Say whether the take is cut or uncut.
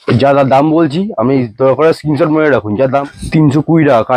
cut